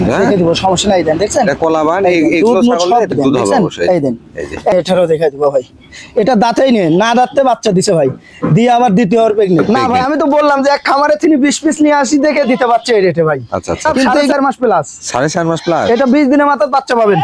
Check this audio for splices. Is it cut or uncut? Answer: cut